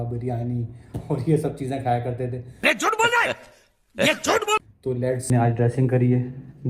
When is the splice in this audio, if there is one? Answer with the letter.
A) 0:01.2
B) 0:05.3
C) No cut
B